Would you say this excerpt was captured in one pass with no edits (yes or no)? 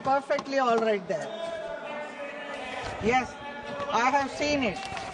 yes